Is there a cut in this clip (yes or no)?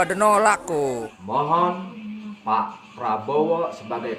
yes